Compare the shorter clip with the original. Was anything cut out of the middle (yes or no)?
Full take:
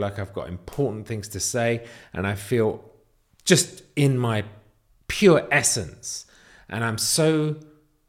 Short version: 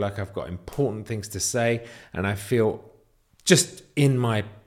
no